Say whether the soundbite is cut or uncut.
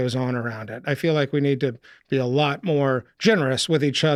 uncut